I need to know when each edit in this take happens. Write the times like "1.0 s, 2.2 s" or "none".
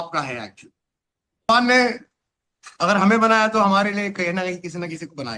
1.5 s